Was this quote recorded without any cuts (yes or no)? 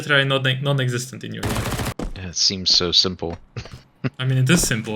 no